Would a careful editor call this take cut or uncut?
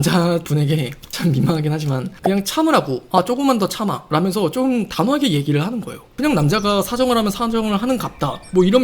cut